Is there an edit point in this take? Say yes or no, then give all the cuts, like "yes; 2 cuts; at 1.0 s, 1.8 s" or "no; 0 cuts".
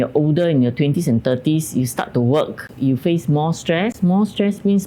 no; 0 cuts